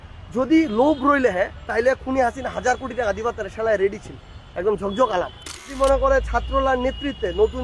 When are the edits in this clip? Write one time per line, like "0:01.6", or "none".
0:05.7